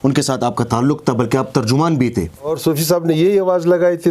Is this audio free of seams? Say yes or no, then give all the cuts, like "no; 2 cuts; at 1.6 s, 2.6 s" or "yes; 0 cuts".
no; 1 cut; at 2.5 s